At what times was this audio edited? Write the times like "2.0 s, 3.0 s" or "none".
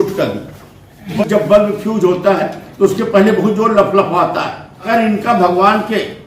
1.2 s, 4.8 s